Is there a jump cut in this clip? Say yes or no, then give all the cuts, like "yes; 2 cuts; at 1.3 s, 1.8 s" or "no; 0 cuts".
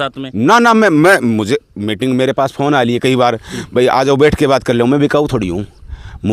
no; 0 cuts